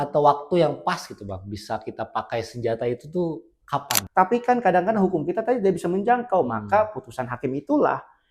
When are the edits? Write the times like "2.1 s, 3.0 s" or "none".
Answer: 4.0 s